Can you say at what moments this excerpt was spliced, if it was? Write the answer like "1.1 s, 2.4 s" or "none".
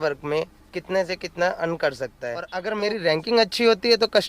2.6 s